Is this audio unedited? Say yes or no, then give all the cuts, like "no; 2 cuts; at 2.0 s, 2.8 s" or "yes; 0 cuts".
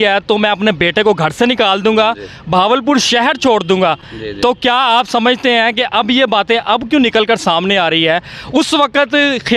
yes; 0 cuts